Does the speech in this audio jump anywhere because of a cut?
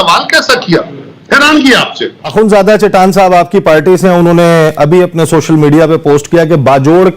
yes; 1 cut; at 2.2 s

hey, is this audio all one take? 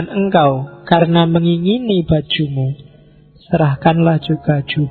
yes; 0 cuts

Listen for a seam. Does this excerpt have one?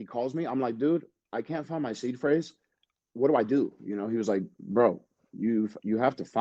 yes; 1 cut; at 2.9 s

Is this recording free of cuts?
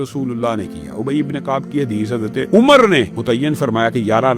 no; 2 cuts; at 2.5 s, 3.1 s

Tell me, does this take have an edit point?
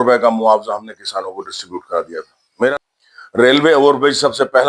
yes; 1 cut; at 2.7 s

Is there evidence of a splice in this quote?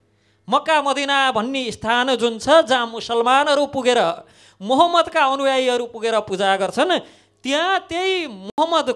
no; 0 cuts

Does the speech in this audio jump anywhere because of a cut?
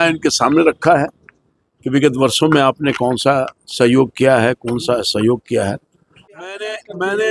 yes; 1 cut; at 6.4 s

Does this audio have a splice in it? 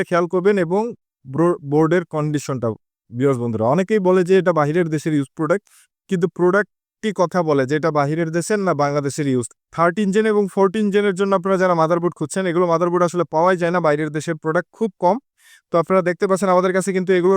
yes; 1 cut; at 9.5 s

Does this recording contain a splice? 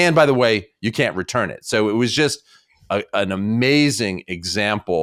no; 0 cuts

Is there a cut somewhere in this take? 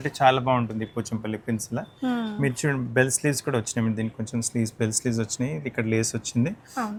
no; 0 cuts

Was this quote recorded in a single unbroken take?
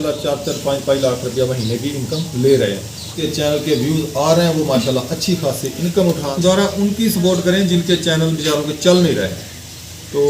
no; 2 cuts; at 3.2 s, 6.3 s

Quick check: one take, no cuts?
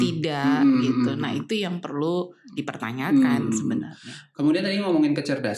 yes; 0 cuts

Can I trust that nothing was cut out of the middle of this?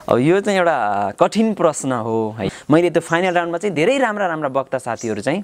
no; 1 cut; at 2.5 s

